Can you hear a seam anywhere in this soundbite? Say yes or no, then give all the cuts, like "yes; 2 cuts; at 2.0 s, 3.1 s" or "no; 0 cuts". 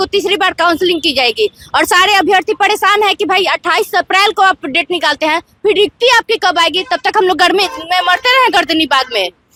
no; 0 cuts